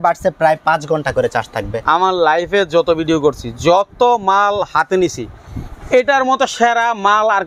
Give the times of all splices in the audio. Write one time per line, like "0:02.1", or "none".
0:01.7